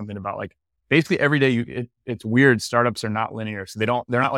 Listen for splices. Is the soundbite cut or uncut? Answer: uncut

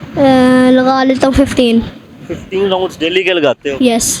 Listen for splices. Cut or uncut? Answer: uncut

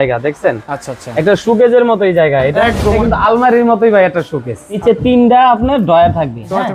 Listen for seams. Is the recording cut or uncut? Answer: cut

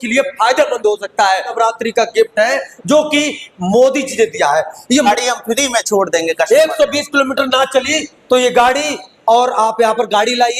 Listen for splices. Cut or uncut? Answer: cut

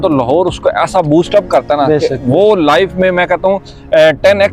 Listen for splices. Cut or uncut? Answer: uncut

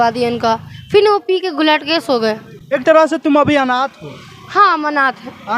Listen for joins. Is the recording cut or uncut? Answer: uncut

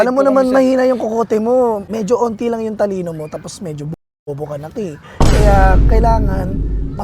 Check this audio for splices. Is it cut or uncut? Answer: cut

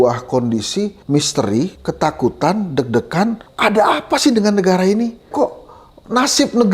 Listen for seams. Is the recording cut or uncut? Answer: cut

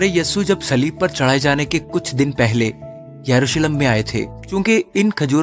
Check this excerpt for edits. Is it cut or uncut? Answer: cut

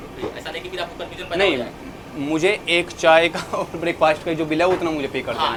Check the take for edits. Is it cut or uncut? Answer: uncut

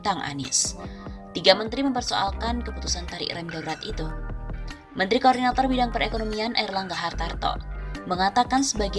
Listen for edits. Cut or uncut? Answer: uncut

